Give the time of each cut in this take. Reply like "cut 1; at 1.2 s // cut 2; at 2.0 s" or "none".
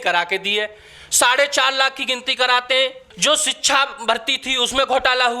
cut 1; at 3.1 s